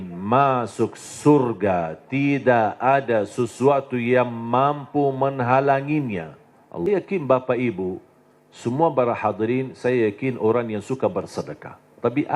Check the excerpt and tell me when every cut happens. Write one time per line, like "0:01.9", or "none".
0:06.9